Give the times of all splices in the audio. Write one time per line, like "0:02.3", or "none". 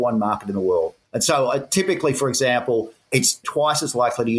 0:01.0
0:03.2